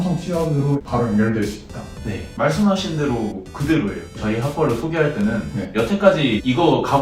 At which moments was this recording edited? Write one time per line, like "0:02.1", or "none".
0:02.3
0:04.2